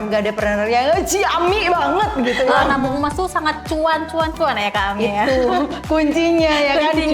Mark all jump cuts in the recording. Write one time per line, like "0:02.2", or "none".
0:02.6